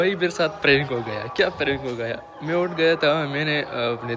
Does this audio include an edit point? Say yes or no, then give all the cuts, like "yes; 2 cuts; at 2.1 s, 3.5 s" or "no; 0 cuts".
no; 0 cuts